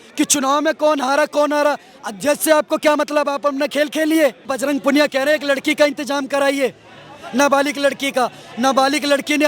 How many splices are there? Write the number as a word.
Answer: one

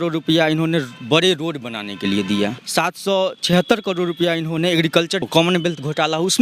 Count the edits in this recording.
two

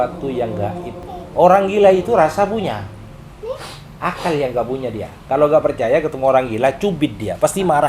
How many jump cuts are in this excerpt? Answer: one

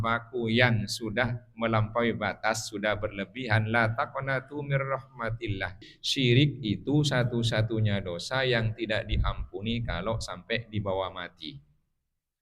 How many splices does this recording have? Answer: one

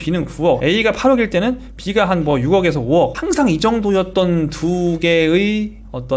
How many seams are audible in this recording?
zero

